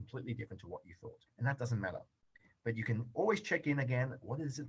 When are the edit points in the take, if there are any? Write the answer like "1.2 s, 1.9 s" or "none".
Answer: 1.2 s